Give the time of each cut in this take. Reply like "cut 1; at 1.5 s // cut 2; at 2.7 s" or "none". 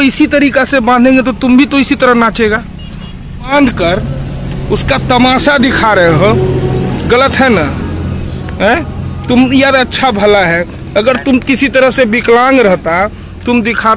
cut 1; at 3.5 s